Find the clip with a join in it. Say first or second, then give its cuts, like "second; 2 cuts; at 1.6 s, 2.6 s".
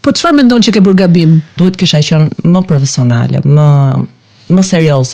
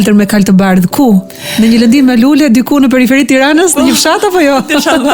first; 1 cut; at 1.5 s